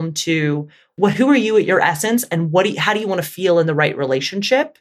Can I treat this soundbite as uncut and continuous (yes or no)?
no